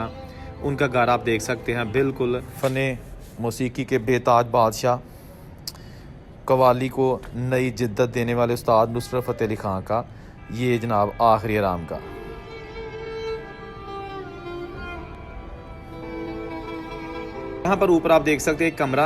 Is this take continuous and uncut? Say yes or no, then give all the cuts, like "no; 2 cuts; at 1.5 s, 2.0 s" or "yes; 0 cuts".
no; 2 cuts; at 2.5 s, 17.7 s